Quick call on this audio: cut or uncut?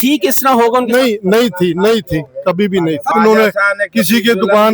cut